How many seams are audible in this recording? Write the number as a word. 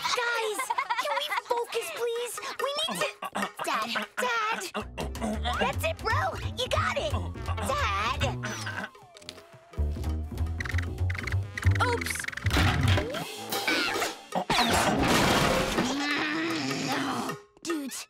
three